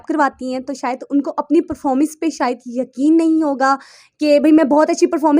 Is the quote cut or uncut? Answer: uncut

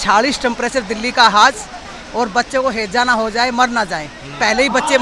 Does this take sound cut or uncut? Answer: uncut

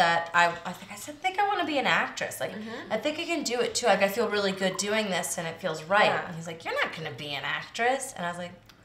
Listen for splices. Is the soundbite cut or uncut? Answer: cut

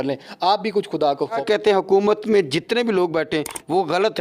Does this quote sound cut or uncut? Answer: cut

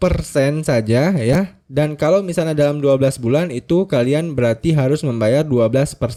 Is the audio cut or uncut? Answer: uncut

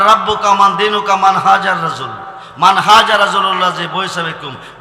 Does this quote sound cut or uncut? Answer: uncut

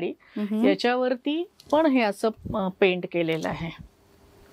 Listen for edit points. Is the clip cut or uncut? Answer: uncut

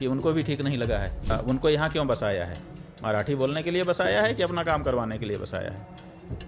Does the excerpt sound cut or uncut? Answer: cut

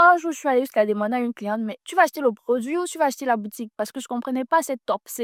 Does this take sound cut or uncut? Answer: uncut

